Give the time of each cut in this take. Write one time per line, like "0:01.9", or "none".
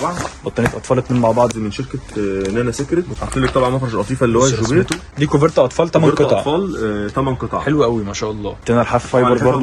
0:03.2
0:05.1
0:08.5